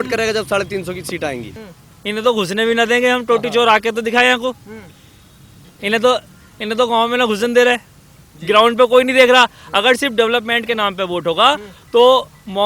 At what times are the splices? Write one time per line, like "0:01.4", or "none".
0:01.5
0:08.3